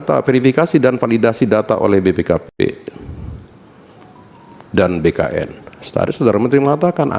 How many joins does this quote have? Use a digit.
0